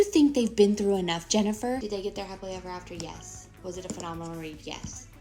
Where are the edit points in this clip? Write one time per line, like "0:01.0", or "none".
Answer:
none